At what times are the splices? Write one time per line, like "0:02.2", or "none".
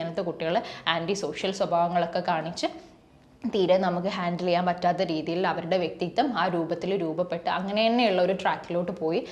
none